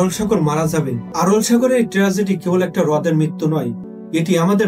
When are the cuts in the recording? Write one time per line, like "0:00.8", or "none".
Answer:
0:01.0